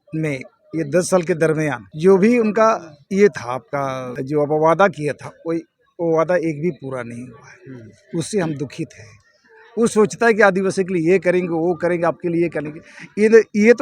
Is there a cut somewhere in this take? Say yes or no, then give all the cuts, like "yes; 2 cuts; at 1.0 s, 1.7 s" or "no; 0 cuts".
yes; 3 cuts; at 1.8 s, 2.9 s, 4.1 s